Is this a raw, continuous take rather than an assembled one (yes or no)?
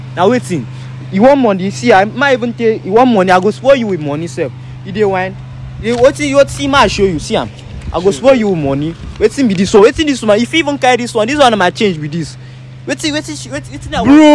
yes